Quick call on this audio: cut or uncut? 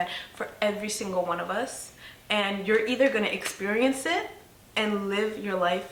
uncut